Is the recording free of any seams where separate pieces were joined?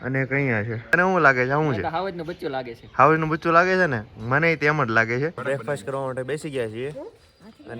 no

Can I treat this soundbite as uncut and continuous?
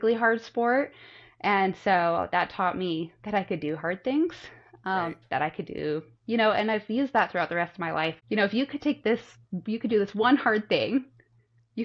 no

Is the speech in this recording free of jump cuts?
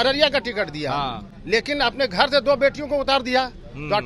yes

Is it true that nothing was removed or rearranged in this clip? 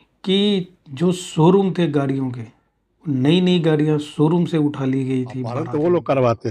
no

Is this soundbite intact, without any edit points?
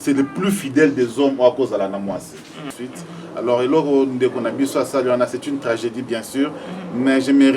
no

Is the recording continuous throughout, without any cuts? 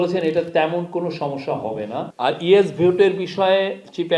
no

